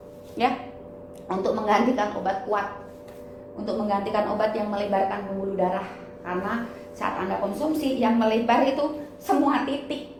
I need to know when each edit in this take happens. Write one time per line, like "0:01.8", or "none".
none